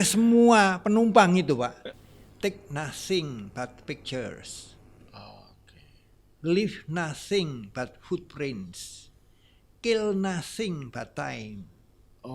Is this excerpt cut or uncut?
cut